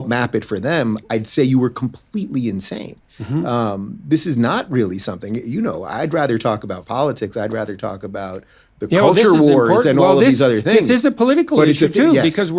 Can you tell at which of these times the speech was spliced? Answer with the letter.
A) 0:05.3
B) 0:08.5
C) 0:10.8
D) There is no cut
C